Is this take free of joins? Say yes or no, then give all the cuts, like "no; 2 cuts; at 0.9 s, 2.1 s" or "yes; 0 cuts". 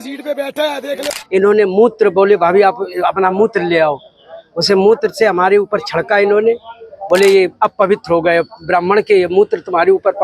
no; 1 cut; at 1.1 s